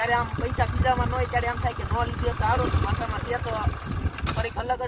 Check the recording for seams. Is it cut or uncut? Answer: uncut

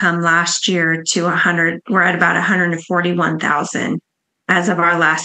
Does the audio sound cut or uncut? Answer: cut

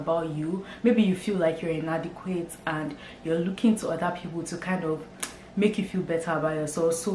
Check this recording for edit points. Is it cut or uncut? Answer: uncut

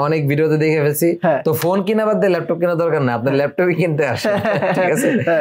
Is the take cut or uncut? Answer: uncut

